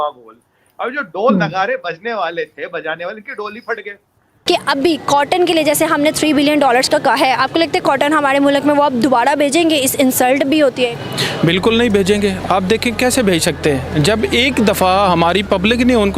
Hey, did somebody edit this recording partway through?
yes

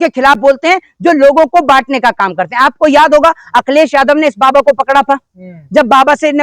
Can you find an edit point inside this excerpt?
no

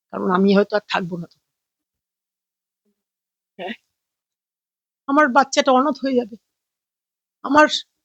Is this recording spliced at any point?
no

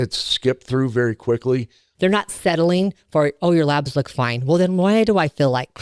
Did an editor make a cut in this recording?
yes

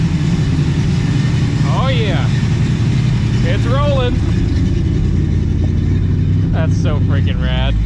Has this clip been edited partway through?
no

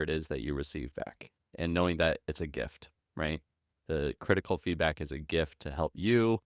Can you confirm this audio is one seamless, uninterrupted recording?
no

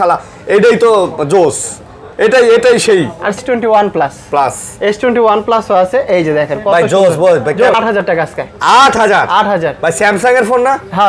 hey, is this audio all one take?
no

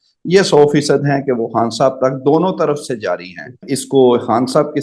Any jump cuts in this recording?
yes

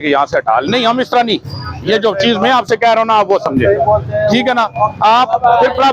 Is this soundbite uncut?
yes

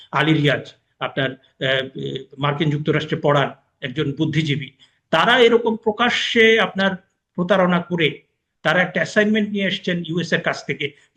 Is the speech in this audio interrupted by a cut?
no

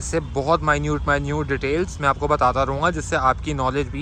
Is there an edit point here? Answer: no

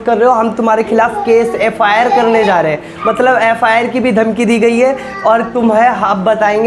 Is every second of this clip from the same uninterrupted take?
yes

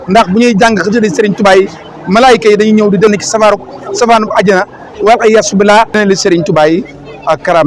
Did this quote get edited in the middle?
yes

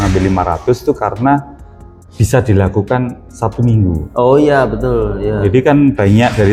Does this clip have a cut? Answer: no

